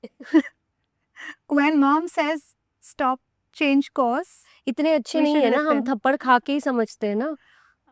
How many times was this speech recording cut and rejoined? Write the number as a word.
zero